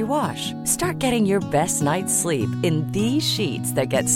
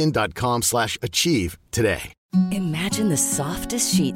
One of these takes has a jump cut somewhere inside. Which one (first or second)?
second